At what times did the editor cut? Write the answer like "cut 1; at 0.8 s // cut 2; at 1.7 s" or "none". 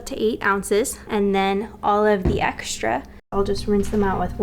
cut 1; at 1.0 s // cut 2; at 3.3 s